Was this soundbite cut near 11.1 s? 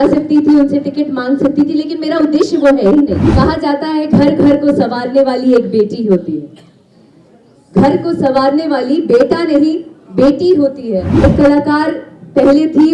yes; 2 cuts; at 3.2 s, 11.1 s

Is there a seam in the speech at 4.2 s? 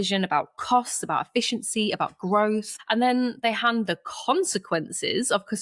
no; 1 cut; at 2.7 s

